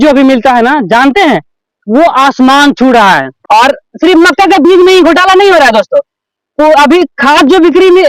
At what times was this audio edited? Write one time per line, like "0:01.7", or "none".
0:03.3